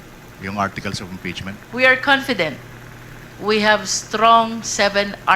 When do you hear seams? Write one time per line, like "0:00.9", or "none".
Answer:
0:01.5